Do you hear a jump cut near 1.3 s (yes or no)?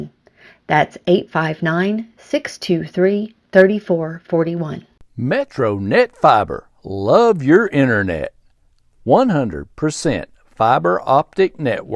no